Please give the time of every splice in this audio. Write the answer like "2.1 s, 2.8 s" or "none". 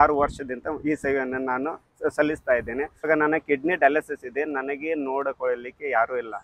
3.1 s